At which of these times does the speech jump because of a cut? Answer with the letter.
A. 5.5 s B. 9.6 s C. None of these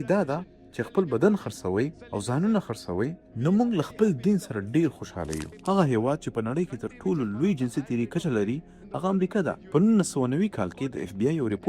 A